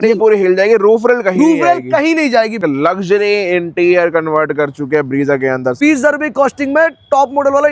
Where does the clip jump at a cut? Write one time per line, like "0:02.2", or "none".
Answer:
0:02.6
0:05.8